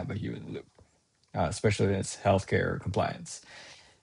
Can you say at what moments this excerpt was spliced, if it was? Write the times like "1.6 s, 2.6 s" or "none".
none